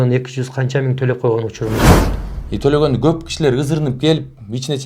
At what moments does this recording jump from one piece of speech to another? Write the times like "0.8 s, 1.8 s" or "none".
2.0 s